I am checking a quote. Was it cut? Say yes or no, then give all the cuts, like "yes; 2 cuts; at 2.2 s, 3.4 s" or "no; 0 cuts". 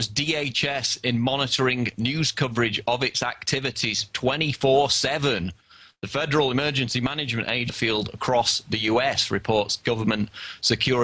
no; 0 cuts